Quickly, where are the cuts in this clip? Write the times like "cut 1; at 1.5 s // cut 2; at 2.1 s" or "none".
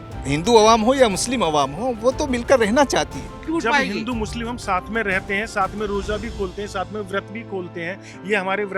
cut 1; at 3.4 s